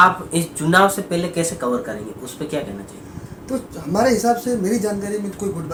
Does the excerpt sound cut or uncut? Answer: uncut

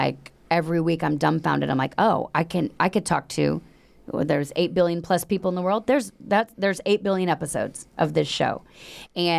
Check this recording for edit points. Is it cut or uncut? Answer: uncut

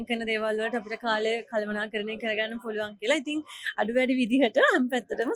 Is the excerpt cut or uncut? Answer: uncut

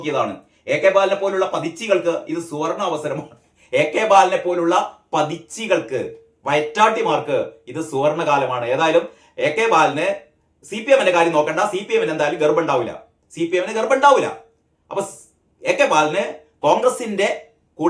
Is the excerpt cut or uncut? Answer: uncut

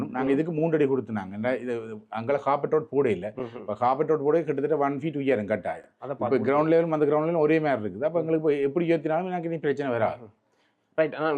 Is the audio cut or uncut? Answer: uncut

